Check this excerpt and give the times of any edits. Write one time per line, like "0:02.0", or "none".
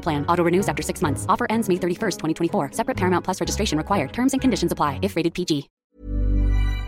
0:05.7